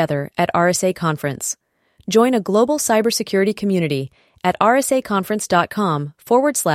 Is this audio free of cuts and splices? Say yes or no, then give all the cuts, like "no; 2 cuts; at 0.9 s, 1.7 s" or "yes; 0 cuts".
yes; 0 cuts